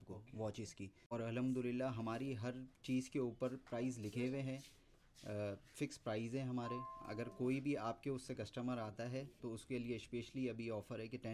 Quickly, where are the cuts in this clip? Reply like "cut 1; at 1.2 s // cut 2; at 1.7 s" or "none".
cut 1; at 1.0 s